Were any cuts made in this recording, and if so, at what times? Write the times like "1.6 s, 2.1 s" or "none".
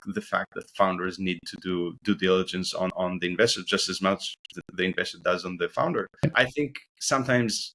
2.9 s, 6.2 s